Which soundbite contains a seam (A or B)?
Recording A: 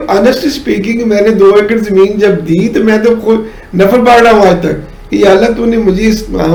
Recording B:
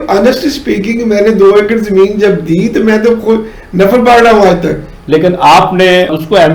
B